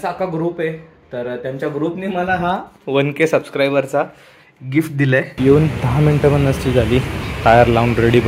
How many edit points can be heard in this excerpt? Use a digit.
2